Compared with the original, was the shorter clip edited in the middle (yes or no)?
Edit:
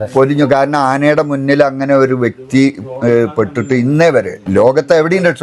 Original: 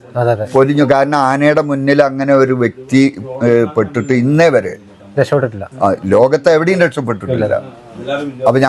yes